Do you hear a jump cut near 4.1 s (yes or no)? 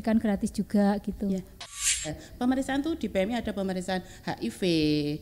no